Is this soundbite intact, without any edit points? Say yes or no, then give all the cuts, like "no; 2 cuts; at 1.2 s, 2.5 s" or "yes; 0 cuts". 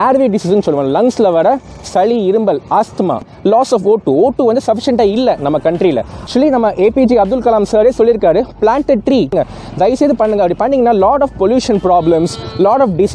no; 3 cuts; at 3.3 s, 6.2 s, 9.3 s